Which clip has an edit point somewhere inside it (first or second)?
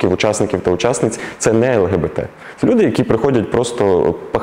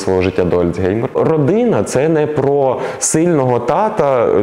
second